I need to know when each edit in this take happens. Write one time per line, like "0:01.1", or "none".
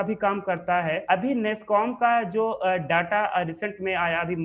0:01.0